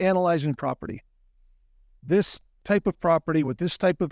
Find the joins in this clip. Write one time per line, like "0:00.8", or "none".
none